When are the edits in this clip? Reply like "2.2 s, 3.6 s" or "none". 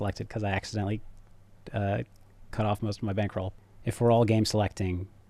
3.5 s